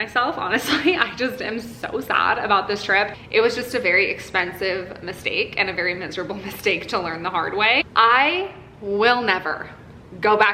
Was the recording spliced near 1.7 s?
no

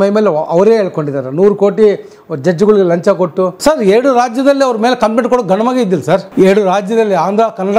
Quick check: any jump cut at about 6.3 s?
yes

